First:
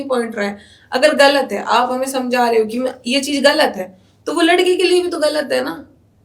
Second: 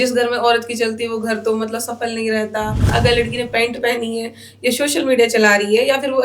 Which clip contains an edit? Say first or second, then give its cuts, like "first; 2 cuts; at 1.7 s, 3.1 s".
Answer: second; 1 cut; at 2.9 s